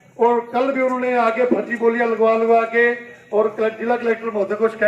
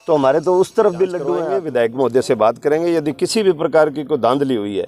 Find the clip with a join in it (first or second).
second